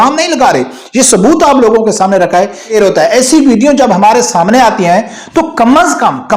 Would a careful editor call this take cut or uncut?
cut